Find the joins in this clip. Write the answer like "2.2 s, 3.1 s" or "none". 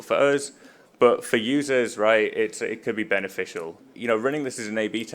3.9 s